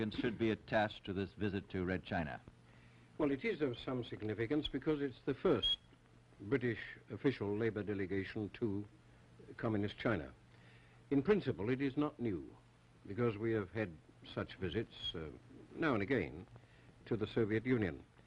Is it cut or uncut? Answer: cut